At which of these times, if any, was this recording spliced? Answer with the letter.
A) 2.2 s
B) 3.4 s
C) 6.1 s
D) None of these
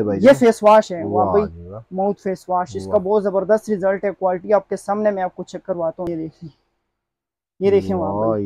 C